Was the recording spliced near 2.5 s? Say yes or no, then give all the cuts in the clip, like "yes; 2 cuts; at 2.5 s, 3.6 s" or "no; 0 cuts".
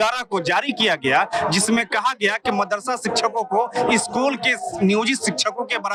no; 0 cuts